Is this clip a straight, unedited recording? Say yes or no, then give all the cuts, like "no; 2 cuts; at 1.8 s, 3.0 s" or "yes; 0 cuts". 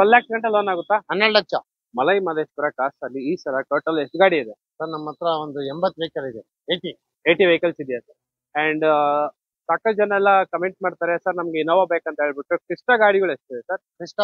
no; 1 cut; at 1.8 s